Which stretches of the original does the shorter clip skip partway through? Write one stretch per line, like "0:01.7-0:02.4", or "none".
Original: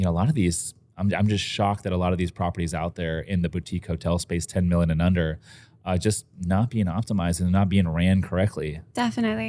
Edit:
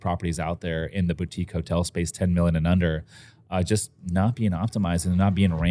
none